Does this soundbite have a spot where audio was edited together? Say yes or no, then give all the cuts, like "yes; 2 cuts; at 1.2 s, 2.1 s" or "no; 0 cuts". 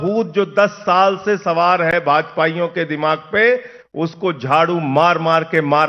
no; 0 cuts